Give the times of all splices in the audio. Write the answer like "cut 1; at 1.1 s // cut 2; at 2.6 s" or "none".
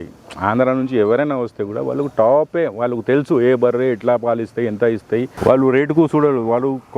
cut 1; at 5.3 s